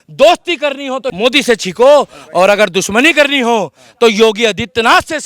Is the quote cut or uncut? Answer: cut